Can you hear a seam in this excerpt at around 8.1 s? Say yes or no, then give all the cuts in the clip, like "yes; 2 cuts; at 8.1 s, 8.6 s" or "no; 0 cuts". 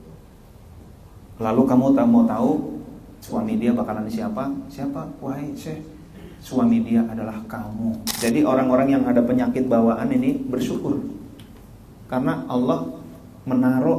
yes; 1 cut; at 8.1 s